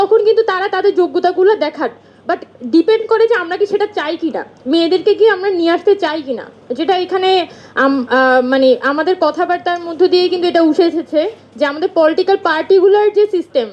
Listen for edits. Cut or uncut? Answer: uncut